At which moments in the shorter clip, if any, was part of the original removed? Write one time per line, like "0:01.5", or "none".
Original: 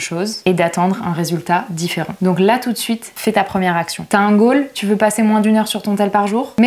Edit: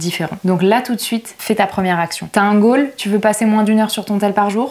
none